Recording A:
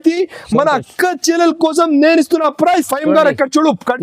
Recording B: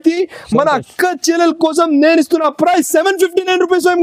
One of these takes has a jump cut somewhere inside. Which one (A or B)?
A